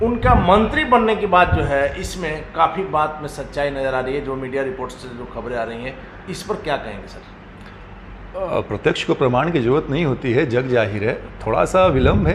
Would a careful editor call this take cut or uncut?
uncut